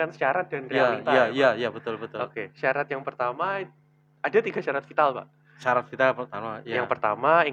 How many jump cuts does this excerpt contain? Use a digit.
0